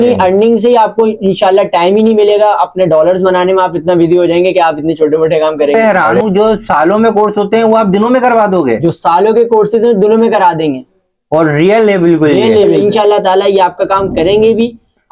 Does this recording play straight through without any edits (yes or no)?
no